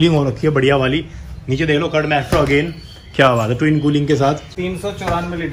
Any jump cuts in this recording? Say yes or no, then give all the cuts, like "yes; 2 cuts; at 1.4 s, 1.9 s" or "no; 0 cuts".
yes; 1 cut; at 4.5 s